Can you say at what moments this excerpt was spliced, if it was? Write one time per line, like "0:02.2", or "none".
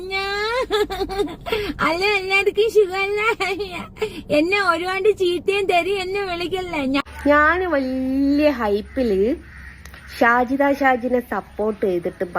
0:07.0